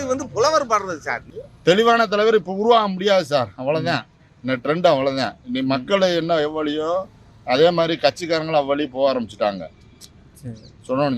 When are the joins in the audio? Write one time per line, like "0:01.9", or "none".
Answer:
0:01.2